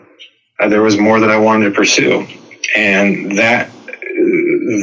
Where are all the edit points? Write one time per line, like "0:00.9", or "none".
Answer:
none